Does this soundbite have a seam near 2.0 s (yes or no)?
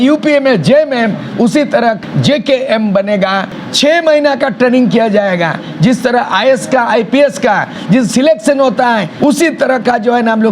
yes